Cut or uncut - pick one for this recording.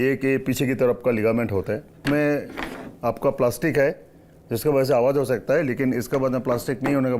cut